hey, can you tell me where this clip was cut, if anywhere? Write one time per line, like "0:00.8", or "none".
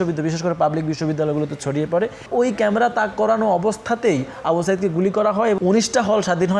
0:02.3
0:05.6